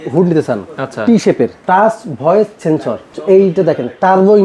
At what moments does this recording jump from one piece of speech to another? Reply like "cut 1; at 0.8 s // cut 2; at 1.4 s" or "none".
cut 1; at 1.6 s // cut 2; at 3.2 s